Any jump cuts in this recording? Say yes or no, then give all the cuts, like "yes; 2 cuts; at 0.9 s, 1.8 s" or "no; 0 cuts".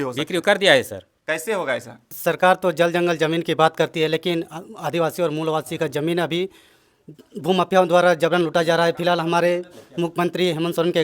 yes; 1 cut; at 2.0 s